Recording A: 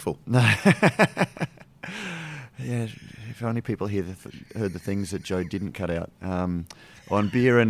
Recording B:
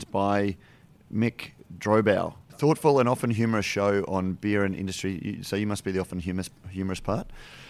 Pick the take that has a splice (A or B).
B